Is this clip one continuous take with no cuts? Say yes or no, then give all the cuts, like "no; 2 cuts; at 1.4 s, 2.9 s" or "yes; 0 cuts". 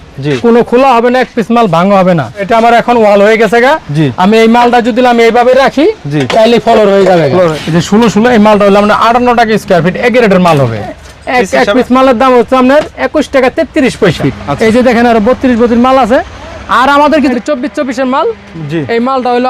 no; 5 cuts; at 2.4 s, 7.6 s, 10.9 s, 14.2 s, 17.3 s